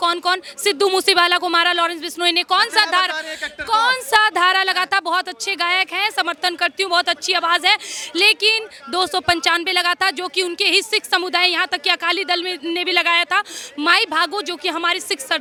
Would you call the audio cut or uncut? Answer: uncut